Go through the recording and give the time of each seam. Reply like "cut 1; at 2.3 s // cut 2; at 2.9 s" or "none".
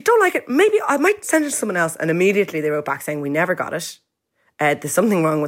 none